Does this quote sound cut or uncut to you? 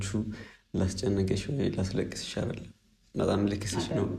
uncut